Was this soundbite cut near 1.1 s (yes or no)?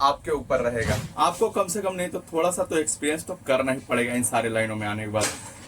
yes